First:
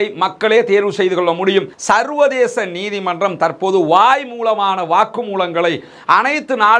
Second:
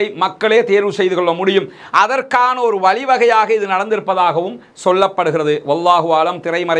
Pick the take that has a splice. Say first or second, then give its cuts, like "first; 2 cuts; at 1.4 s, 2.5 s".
first; 1 cut; at 1.7 s